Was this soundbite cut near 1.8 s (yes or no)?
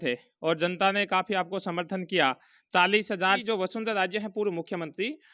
no